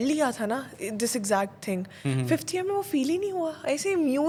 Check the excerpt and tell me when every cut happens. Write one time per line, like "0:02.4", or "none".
none